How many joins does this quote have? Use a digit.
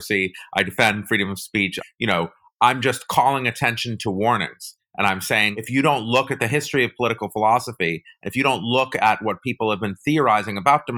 2